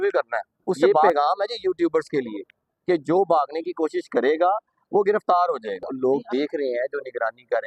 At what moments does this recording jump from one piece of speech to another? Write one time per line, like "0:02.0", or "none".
0:01.0
0:05.9